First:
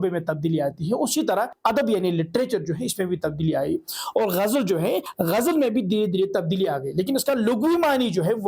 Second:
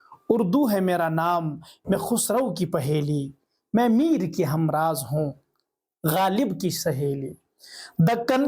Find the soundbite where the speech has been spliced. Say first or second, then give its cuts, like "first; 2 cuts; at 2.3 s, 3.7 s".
first; 2 cuts; at 1.5 s, 5.1 s